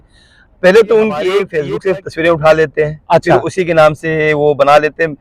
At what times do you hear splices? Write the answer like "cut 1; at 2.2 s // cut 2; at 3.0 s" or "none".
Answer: cut 1; at 1.6 s